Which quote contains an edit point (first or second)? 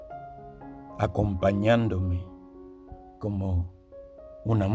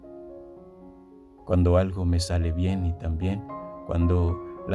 second